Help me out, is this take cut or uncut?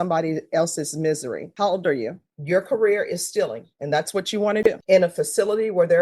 cut